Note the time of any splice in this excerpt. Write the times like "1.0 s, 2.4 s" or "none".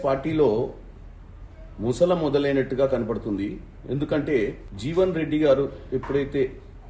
4.7 s